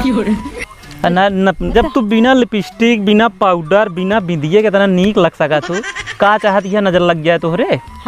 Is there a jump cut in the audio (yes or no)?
yes